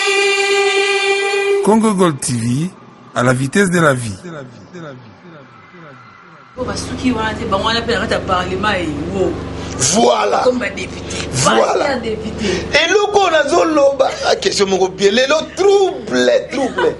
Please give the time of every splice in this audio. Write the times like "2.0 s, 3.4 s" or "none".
none